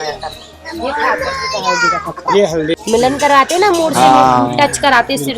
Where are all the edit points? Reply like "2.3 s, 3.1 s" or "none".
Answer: 2.8 s